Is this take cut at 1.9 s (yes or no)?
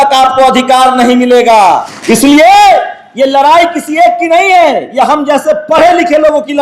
yes